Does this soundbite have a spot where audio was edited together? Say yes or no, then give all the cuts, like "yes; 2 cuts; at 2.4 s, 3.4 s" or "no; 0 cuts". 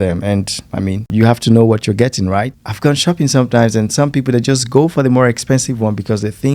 yes; 1 cut; at 2.5 s